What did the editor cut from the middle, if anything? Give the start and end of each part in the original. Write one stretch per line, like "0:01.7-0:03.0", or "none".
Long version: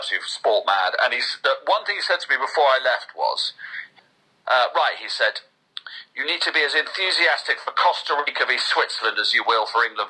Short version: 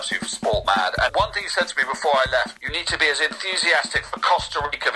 0:01.1-0:01.6
0:03.1-0:06.1